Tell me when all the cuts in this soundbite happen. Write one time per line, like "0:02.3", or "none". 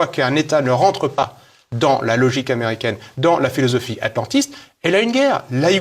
0:01.2